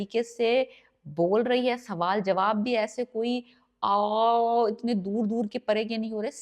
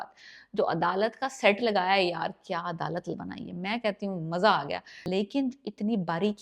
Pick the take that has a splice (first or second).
second